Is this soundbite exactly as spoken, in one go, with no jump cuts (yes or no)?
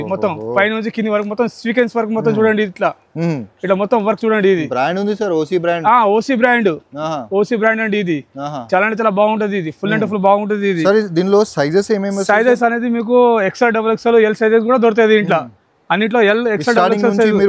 yes